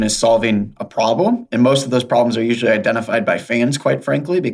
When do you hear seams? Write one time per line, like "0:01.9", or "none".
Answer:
none